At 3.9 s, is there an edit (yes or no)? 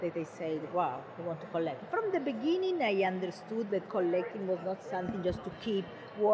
yes